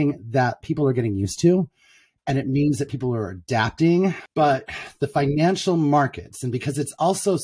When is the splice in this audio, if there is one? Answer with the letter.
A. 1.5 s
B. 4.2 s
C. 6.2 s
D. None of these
B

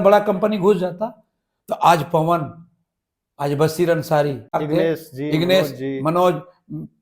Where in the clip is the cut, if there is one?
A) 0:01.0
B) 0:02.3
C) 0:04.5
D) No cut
C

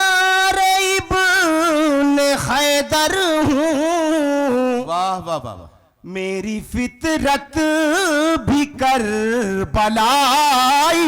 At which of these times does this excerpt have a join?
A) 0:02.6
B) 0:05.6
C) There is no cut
C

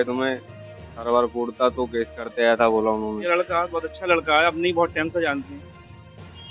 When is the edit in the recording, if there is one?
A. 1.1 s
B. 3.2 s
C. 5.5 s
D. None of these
B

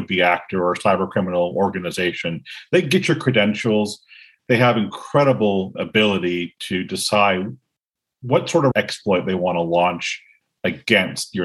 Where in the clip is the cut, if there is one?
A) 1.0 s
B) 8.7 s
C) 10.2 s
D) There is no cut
B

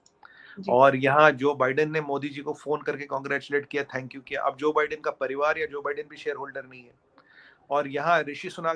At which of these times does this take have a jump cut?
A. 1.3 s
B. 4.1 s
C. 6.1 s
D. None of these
D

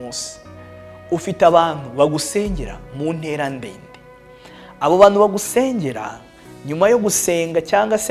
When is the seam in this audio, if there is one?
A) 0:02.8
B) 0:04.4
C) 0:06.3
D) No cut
D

